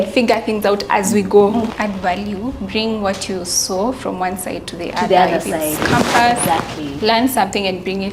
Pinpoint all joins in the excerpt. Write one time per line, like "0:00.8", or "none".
0:01.7